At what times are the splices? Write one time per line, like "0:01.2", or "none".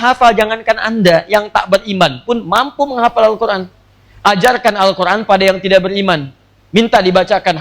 none